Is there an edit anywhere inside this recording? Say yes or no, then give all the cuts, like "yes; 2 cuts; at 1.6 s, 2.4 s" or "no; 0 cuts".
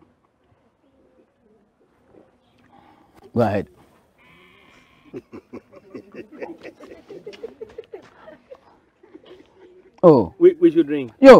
no; 0 cuts